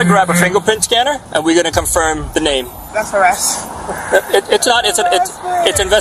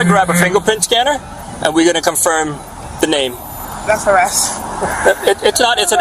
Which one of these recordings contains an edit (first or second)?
first